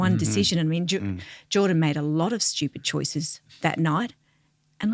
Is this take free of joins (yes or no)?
no